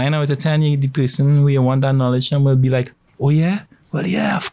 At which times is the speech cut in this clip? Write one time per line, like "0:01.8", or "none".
none